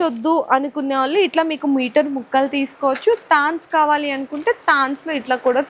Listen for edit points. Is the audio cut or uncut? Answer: uncut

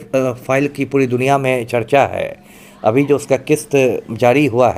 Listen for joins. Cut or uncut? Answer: uncut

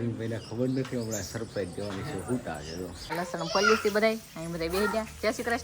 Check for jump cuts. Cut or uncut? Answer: cut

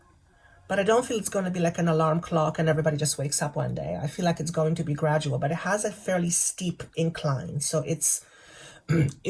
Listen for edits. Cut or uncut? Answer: uncut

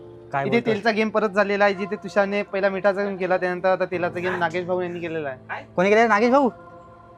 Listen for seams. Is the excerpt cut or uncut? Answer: uncut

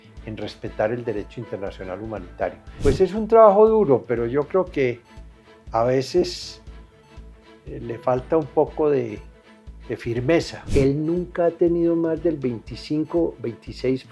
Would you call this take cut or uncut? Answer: cut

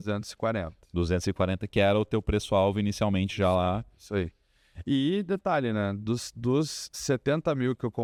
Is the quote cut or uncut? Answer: uncut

